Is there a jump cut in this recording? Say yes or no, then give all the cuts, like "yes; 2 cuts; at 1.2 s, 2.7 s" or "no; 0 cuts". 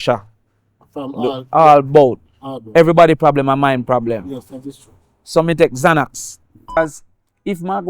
yes; 1 cut; at 6.8 s